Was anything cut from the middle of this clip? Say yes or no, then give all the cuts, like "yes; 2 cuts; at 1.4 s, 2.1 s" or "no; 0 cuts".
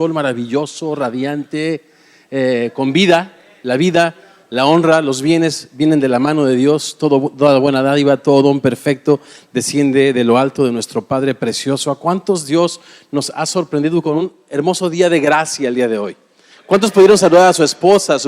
yes; 1 cut; at 12.0 s